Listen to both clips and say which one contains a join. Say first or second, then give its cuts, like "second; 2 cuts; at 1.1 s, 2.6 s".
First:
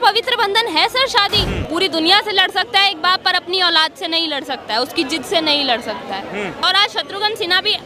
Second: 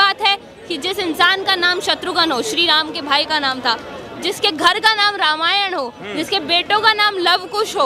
first; 2 cuts; at 1.5 s, 6.6 s